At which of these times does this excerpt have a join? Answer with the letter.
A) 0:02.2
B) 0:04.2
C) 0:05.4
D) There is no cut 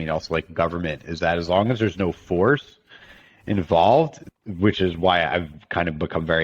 B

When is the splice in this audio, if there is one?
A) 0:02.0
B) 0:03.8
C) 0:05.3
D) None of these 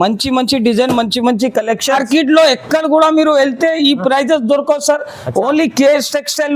A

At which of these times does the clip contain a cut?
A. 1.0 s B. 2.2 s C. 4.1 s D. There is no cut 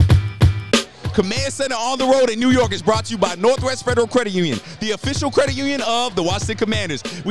A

